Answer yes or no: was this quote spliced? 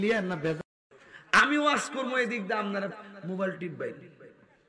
yes